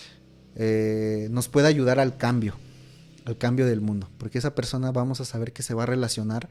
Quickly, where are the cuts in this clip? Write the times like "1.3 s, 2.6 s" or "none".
none